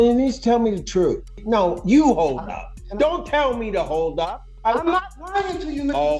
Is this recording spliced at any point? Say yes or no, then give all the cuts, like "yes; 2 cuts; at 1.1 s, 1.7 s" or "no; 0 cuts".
yes; 2 cuts; at 1.4 s, 4.5 s